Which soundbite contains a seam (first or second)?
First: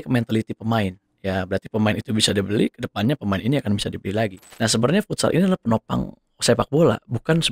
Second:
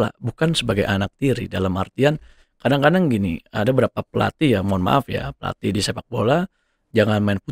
first